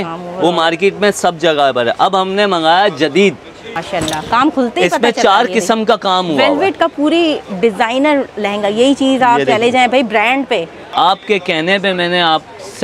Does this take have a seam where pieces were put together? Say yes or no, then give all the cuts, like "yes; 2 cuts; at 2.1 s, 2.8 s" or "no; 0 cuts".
yes; 2 cuts; at 3.7 s, 10.8 s